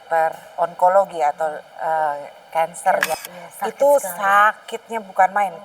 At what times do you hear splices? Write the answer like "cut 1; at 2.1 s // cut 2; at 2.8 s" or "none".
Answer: cut 1; at 3.1 s